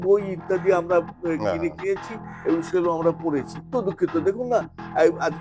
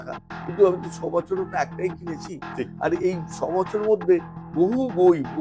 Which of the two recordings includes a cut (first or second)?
first